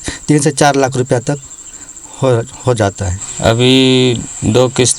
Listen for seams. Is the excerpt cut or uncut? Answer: cut